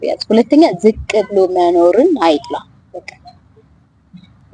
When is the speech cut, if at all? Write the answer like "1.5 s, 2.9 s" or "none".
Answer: none

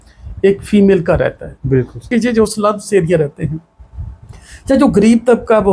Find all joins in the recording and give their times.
2.1 s

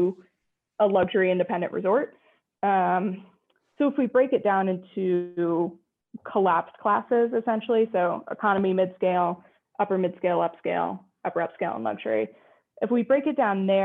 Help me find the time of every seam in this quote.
none

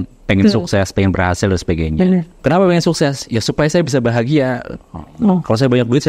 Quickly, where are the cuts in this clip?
2.3 s

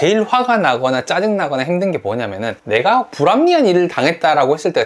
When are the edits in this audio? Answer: 2.5 s

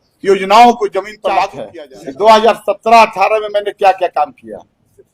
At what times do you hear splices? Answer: 1.6 s

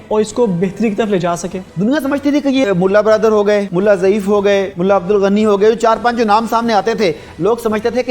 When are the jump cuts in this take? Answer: 1.6 s, 2.6 s, 3.7 s, 4.7 s

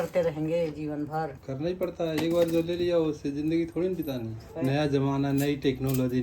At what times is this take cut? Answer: 1.4 s, 4.5 s

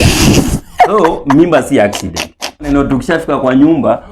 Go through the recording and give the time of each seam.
2.7 s

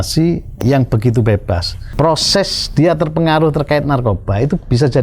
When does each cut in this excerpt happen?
1.8 s

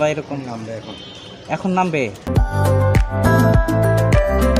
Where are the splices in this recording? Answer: 2.3 s, 3.5 s

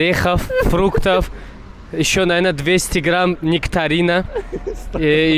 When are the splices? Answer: none

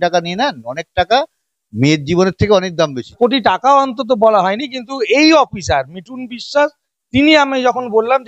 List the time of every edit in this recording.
3.1 s

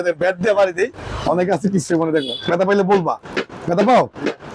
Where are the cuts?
none

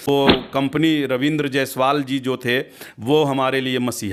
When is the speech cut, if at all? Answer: none

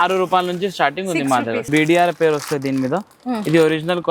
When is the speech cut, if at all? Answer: 1.7 s

